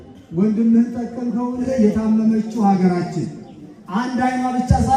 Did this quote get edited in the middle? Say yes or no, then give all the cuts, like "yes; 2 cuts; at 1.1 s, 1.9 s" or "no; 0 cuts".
yes; 1 cut; at 1.7 s